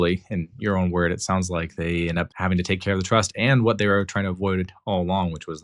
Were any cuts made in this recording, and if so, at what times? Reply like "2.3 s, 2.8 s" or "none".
2.3 s